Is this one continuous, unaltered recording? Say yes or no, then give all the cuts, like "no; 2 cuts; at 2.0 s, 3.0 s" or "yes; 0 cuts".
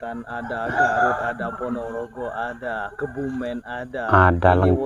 yes; 0 cuts